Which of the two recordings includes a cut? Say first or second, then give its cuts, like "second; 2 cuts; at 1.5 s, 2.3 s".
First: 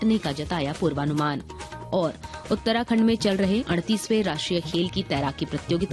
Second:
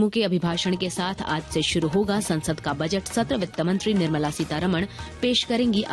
first; 1 cut; at 3.7 s